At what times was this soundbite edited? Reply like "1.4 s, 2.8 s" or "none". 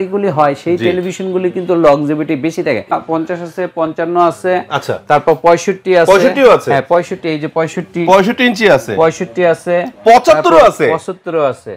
2.9 s